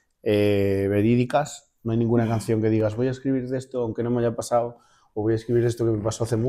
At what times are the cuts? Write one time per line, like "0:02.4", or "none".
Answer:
none